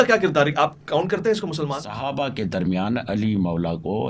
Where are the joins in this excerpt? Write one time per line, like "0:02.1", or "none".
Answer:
0:01.9